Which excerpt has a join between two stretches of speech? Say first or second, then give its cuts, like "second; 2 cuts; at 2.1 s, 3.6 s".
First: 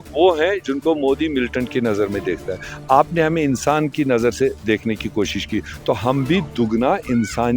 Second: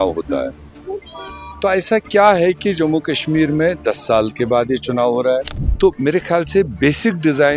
second; 1 cut; at 5.6 s